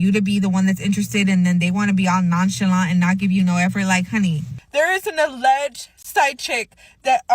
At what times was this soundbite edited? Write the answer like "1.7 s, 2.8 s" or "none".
4.5 s

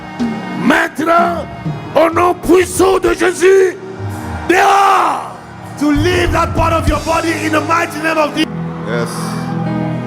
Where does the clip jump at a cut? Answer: 8.4 s

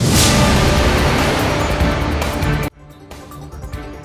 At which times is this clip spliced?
2.2 s

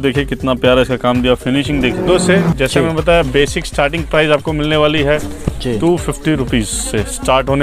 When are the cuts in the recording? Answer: 2.0 s

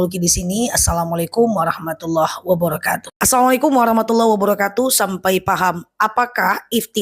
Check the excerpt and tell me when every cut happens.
3.1 s

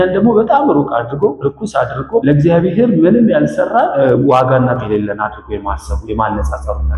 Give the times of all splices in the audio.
1.9 s, 3.9 s, 4.8 s

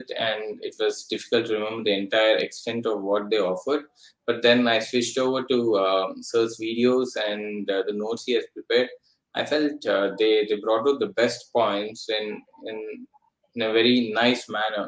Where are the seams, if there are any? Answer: none

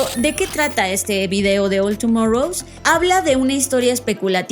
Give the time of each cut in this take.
2.7 s

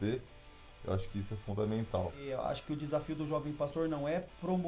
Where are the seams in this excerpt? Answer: 2.2 s

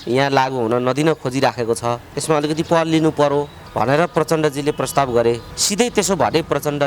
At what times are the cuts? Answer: 2.1 s, 3.6 s, 5.6 s

